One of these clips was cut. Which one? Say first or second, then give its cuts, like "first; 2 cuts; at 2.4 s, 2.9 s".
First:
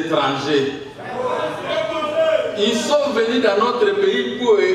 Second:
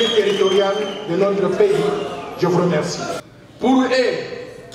second; 1 cut; at 3.2 s